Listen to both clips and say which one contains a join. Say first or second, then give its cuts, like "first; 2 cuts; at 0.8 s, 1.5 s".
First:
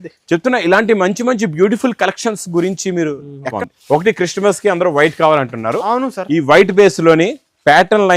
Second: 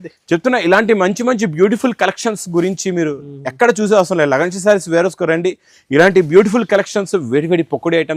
first; 1 cut; at 3.5 s